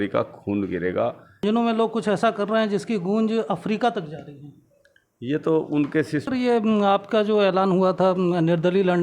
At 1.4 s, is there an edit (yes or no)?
yes